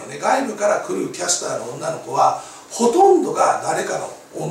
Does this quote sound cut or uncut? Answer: uncut